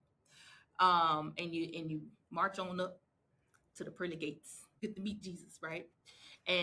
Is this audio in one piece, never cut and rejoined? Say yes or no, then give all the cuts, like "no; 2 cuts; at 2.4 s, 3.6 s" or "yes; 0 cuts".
no; 1 cut; at 4.8 s